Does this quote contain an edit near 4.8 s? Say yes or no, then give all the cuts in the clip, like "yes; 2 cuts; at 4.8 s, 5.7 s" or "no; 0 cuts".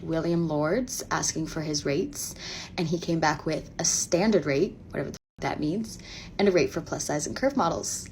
yes; 1 cut; at 4.8 s